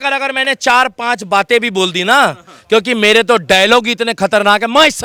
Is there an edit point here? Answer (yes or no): no